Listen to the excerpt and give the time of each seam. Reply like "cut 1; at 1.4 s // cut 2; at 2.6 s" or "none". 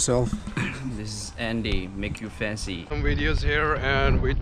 cut 1; at 2.9 s